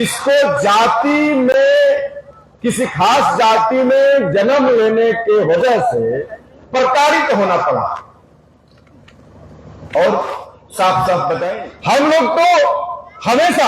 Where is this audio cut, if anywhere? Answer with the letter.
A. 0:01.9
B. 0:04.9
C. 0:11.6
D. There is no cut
C